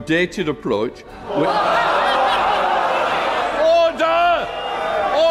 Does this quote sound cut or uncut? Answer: cut